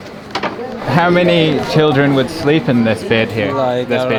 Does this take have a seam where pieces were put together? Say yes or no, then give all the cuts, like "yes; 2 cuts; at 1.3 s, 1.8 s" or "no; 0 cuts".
no; 0 cuts